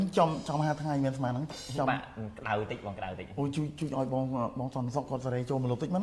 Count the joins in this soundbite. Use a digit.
0